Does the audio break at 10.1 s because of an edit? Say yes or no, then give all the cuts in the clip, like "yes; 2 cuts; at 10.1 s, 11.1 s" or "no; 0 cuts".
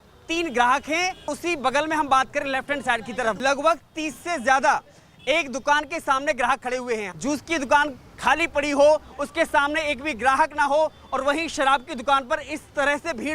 no; 3 cuts; at 1.3 s, 3.4 s, 7.1 s